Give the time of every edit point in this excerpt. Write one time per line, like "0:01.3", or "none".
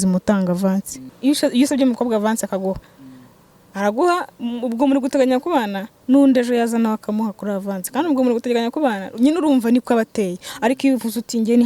0:00.9